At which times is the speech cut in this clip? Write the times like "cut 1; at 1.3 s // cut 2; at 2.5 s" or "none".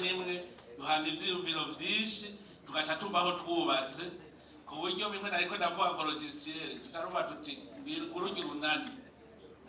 none